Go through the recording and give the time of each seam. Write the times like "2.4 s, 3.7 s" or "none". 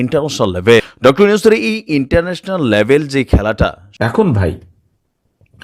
0.9 s, 3.8 s